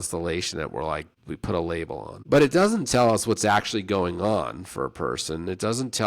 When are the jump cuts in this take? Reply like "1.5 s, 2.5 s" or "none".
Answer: 1.2 s, 2.1 s